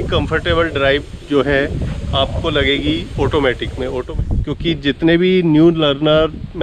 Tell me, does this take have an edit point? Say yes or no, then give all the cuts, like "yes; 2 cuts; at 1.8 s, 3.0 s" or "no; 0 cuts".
yes; 1 cut; at 4.0 s